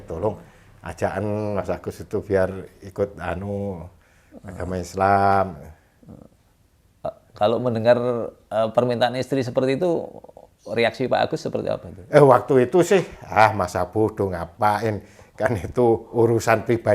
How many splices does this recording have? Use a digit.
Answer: 1